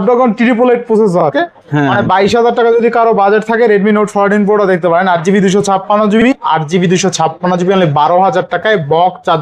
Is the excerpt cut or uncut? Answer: cut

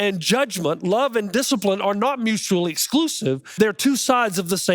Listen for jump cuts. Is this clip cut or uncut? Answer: cut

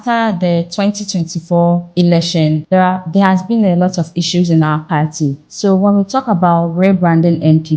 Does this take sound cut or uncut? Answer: cut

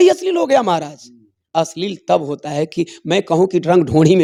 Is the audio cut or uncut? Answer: uncut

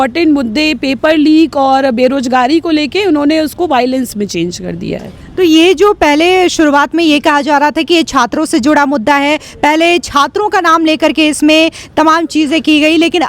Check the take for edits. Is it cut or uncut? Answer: uncut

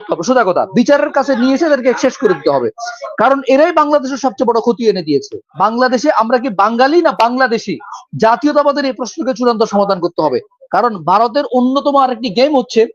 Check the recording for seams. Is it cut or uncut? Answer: cut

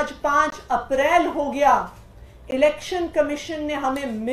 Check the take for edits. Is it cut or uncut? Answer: uncut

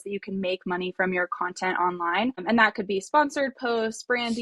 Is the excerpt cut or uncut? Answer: cut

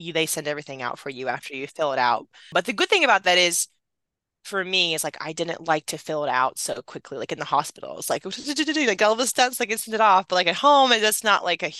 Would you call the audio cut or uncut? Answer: cut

